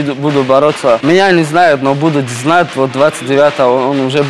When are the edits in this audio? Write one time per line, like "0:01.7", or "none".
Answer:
0:01.0